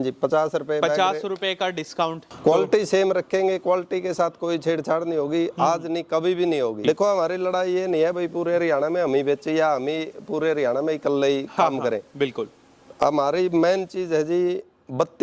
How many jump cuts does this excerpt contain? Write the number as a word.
two